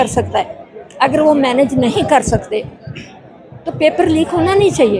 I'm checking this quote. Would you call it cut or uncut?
uncut